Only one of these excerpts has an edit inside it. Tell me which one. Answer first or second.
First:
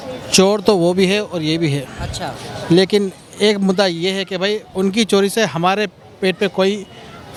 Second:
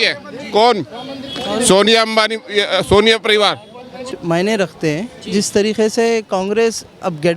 second